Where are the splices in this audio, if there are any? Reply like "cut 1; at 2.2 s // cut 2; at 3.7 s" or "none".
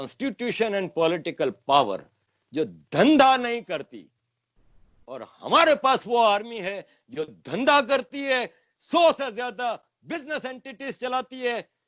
none